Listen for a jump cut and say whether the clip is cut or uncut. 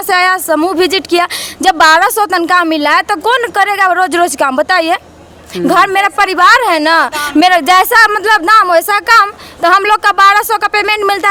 uncut